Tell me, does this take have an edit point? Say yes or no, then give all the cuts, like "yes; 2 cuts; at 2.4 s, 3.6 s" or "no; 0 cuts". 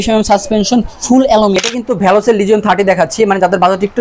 yes; 1 cut; at 1.7 s